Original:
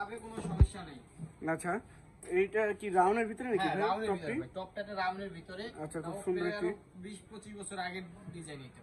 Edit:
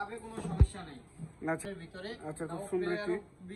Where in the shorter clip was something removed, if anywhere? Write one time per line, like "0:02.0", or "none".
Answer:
0:01.6